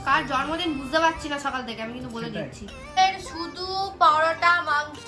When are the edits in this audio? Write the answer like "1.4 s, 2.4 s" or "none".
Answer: none